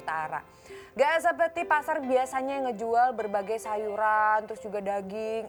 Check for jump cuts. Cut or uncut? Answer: uncut